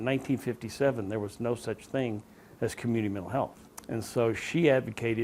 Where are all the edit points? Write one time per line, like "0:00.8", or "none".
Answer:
0:03.7